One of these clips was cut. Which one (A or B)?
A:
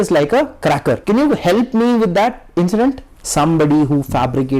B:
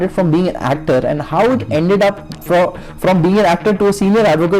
A